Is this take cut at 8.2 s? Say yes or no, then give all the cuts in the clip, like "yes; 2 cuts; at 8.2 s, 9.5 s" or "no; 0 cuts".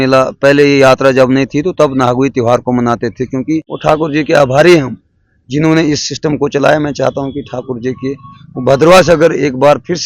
no; 1 cut; at 3.7 s